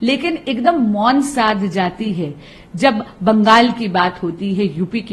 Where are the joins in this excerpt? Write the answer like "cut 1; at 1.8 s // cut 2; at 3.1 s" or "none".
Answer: none